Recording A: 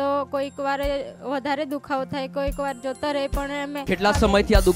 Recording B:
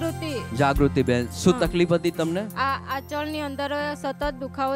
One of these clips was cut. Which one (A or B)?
A